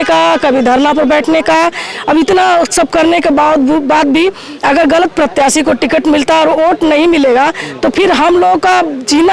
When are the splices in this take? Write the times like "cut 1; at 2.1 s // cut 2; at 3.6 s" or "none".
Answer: none